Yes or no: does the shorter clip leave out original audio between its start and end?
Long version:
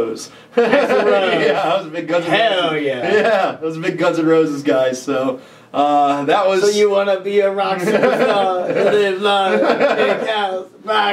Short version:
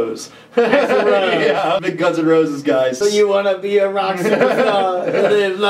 yes